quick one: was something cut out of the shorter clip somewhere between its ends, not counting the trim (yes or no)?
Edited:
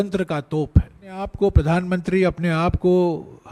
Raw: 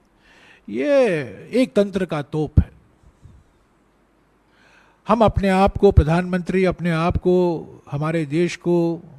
yes